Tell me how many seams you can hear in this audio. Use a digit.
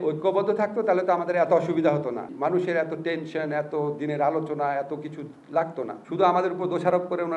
2